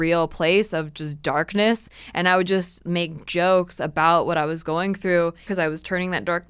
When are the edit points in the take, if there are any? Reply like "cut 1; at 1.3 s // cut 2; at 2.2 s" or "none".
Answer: cut 1; at 5.5 s